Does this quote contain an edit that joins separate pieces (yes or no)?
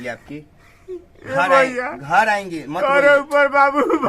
no